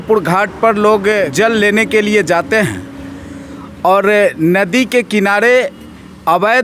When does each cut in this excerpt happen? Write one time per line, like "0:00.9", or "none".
0:01.3